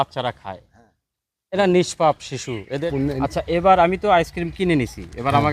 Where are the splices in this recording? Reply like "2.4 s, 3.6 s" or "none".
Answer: 2.8 s